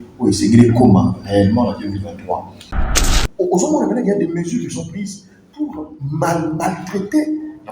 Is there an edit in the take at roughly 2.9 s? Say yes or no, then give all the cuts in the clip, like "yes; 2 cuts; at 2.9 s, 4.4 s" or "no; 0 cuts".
yes; 1 cut; at 2.9 s